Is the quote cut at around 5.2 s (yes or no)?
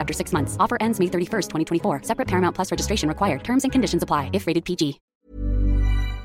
yes